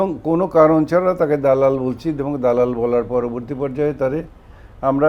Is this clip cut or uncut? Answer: uncut